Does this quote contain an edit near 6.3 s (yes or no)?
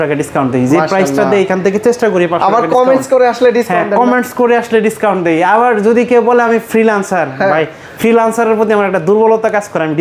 no